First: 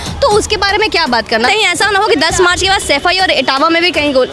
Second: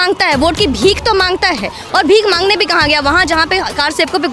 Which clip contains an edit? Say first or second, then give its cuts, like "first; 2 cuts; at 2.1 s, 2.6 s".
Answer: first; 1 cut; at 1.5 s